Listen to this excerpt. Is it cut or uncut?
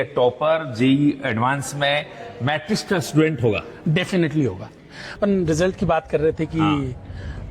cut